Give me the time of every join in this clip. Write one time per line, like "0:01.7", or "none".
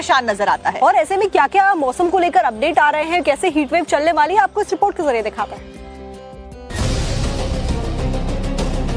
0:04.5